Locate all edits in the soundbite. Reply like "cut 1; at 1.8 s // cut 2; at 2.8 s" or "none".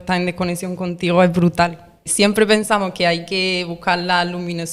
cut 1; at 2.1 s